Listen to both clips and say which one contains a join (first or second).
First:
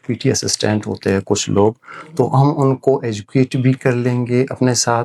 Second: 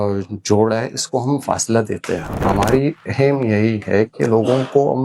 second